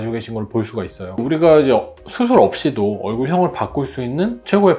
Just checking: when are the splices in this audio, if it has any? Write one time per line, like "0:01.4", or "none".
0:01.0